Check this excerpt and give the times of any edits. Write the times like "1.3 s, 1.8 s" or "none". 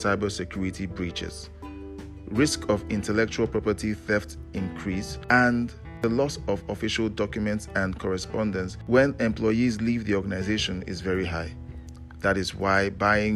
5.1 s, 5.8 s, 8.8 s